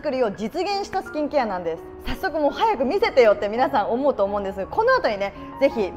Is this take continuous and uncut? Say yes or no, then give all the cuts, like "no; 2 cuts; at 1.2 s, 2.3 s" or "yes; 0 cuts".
yes; 0 cuts